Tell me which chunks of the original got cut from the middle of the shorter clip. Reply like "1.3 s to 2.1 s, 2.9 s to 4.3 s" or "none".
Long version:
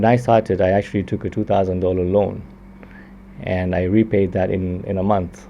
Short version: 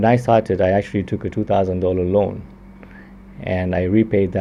none